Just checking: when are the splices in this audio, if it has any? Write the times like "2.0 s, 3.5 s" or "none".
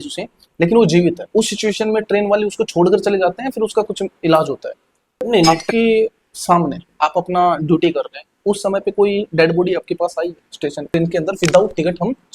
5.5 s, 10.9 s